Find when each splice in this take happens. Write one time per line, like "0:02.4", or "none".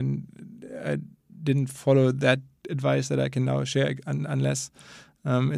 none